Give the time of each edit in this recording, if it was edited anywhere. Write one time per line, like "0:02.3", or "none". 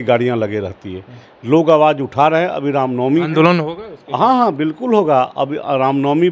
none